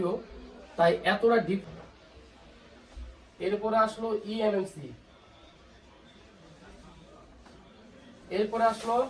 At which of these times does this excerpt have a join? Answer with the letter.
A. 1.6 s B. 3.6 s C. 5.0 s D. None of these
A